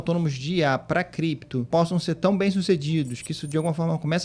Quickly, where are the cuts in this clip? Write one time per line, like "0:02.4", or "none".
0:01.7